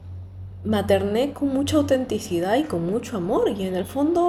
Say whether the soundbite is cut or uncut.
uncut